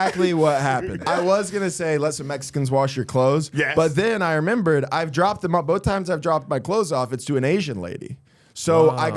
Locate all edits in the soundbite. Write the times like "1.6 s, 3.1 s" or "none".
0.9 s